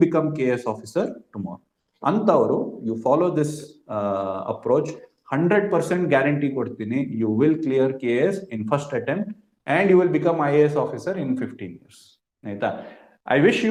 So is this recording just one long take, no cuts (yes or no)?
yes